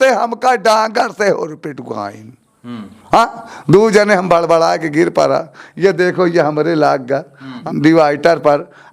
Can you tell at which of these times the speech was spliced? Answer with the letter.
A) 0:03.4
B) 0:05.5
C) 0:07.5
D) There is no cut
C